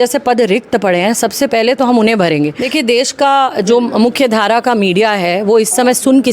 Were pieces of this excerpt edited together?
yes; 1 cut; at 2.6 s

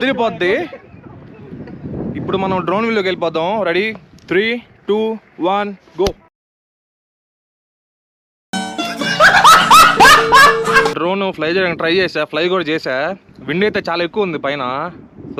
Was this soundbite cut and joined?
no; 0 cuts

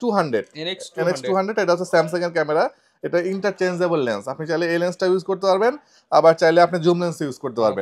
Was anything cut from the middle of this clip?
no; 0 cuts

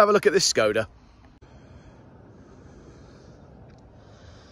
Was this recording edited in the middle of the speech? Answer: no; 0 cuts

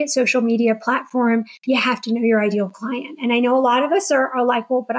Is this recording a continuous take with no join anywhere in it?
yes; 0 cuts

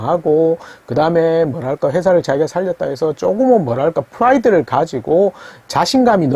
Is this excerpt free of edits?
yes; 0 cuts

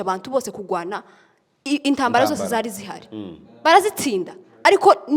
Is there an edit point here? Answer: no; 0 cuts

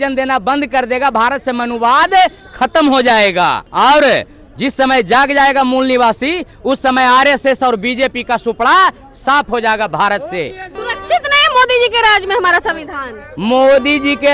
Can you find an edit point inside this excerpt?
yes; 2 cuts; at 3.6 s, 10.8 s

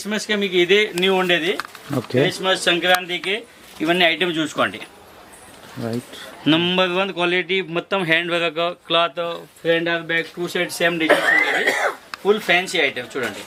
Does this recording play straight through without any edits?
yes; 0 cuts

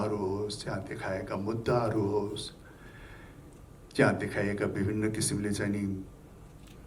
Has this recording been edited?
no; 0 cuts

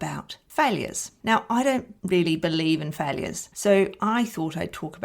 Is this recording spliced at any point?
yes; 2 cuts; at 1.9 s, 3.5 s

